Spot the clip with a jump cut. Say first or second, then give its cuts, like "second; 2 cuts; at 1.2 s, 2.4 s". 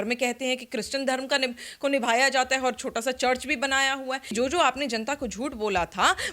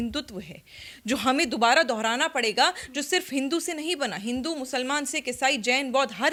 first; 1 cut; at 4.3 s